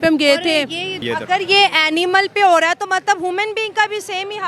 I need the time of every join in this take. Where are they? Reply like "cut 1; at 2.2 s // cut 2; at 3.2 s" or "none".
cut 1; at 1.0 s

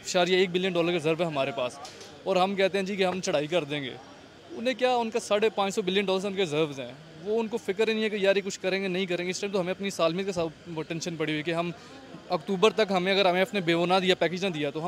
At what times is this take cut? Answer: none

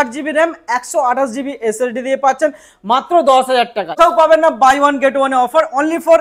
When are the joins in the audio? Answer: cut 1; at 4.0 s

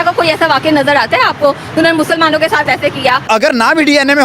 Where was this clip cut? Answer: cut 1; at 3.3 s

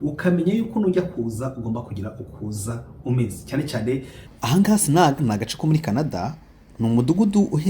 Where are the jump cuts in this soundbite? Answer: cut 1; at 4.2 s

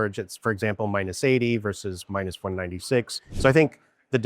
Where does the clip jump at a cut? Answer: cut 1; at 3.2 s

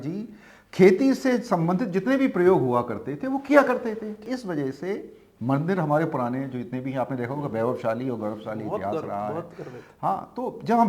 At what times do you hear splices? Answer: cut 1; at 4.2 s

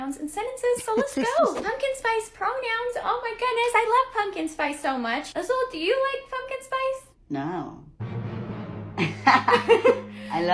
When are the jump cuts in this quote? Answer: none

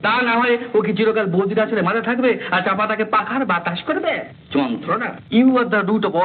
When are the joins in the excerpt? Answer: cut 1; at 5.1 s

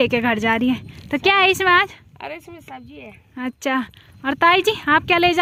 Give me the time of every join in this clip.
none

